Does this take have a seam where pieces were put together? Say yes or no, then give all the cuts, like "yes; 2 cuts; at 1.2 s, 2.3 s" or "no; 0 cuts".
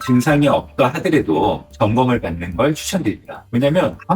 yes; 1 cut; at 1.7 s